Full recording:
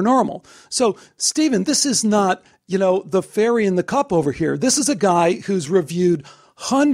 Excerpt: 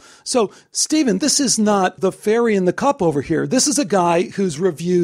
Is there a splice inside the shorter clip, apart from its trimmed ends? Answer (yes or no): yes